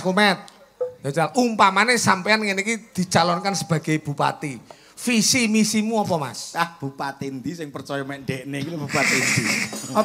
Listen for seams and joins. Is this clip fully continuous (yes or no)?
yes